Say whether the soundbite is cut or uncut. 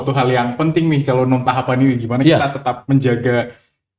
uncut